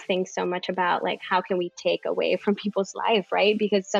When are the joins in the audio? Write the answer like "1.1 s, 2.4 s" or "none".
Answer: none